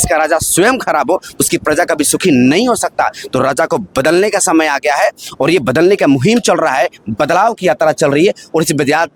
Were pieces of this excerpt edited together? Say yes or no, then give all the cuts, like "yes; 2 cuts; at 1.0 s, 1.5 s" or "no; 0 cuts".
no; 0 cuts